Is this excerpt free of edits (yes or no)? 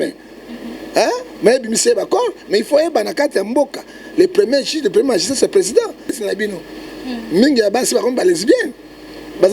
no